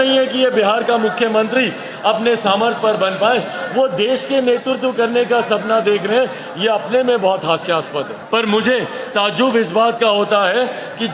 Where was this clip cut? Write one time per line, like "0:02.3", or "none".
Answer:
0:08.2